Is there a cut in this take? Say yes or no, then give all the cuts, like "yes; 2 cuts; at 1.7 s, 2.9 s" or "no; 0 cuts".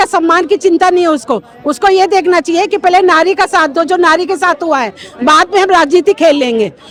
no; 0 cuts